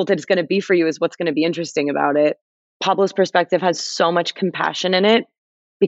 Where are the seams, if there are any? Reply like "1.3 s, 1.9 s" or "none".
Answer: 2.4 s

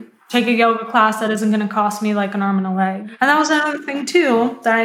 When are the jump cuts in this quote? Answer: 3.0 s

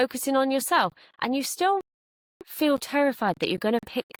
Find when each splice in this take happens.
none

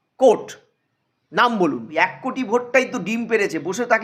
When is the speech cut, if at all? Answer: 1.9 s

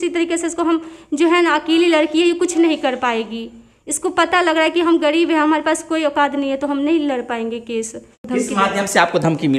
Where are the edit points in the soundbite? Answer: 8.2 s

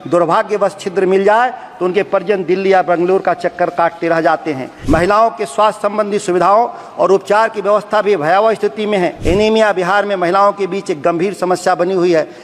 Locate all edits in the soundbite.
4.7 s, 9.2 s

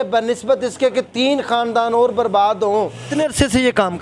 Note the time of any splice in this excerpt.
3.1 s

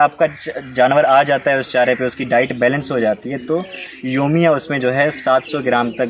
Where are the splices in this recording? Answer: none

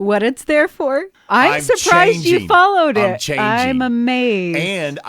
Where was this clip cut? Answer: 1.1 s

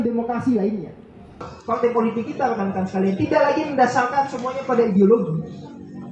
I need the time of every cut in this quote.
1.4 s

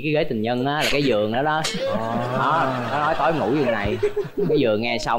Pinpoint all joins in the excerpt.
none

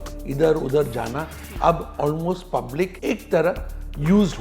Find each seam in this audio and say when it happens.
3.0 s

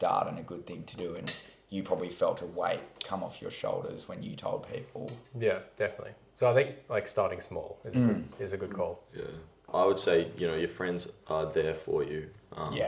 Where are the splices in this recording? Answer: none

